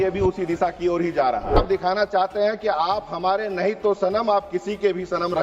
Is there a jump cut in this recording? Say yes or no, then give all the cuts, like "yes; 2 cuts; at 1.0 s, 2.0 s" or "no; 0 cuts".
yes; 1 cut; at 1.6 s